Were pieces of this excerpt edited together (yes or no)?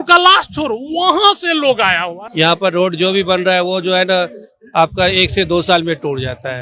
yes